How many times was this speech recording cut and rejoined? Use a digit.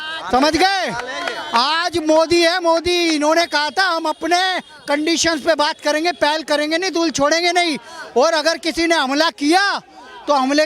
0